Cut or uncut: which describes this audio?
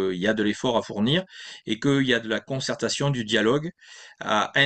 uncut